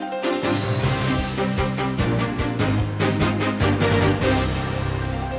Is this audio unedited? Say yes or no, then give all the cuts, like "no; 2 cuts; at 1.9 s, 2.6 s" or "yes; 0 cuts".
no; 1 cut; at 3.9 s